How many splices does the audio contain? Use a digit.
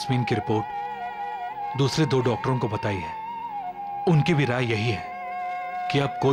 0